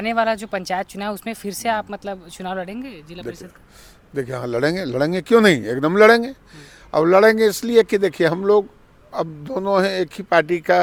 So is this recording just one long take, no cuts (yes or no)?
yes